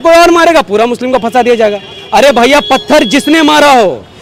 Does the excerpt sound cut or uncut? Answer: uncut